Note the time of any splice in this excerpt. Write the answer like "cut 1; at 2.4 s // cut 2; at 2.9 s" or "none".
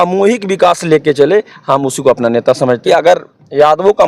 cut 1; at 2.8 s